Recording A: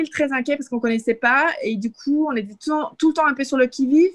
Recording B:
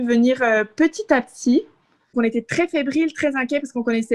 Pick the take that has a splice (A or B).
B